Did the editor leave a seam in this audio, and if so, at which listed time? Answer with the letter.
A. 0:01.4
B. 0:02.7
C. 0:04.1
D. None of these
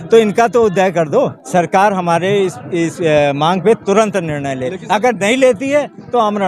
A